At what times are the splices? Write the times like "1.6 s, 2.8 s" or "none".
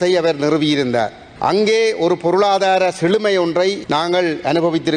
1.2 s, 3.8 s

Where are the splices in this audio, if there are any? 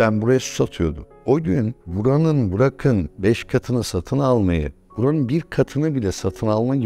1.1 s

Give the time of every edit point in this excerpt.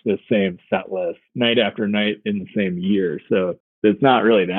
1.2 s, 3.6 s

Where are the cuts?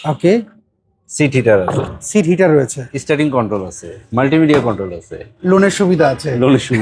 none

